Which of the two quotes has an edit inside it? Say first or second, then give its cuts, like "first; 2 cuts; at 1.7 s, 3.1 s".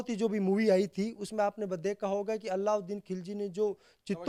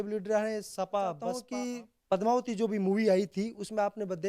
second; 1 cut; at 1.4 s